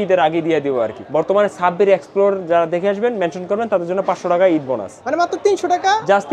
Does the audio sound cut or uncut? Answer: cut